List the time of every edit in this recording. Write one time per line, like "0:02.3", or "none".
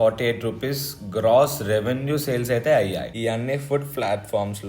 0:03.1